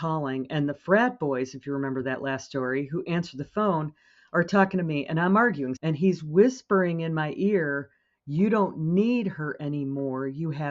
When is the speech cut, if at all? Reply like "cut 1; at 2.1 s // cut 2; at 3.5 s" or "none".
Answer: cut 1; at 5.8 s